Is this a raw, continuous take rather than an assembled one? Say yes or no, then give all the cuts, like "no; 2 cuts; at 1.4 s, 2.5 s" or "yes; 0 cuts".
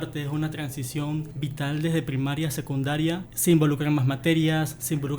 no; 2 cuts; at 1.3 s, 3.3 s